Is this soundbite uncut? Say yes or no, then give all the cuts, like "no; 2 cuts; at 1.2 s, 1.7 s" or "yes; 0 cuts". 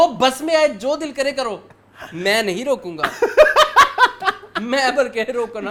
yes; 0 cuts